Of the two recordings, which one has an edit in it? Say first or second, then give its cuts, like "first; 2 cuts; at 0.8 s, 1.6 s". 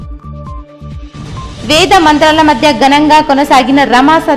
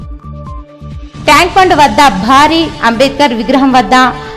second; 1 cut; at 1.2 s